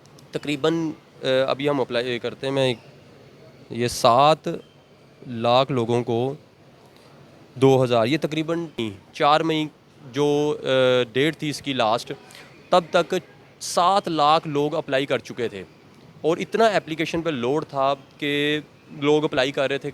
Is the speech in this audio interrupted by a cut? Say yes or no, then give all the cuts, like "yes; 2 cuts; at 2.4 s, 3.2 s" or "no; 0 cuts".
yes; 1 cut; at 8.9 s